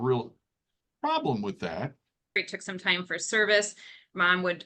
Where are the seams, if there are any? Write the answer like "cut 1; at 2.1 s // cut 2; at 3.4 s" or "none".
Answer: cut 1; at 2.4 s